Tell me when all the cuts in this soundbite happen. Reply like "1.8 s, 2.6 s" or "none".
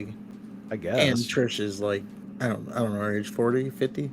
2.2 s